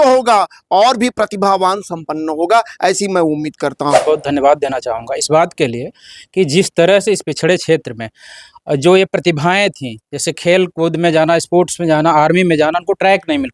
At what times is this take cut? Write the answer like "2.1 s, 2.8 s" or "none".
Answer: 4.0 s